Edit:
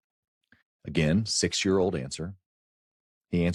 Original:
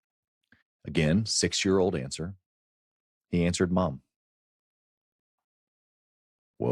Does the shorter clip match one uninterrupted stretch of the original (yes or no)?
yes